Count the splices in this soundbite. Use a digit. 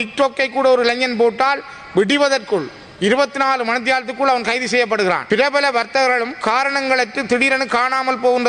1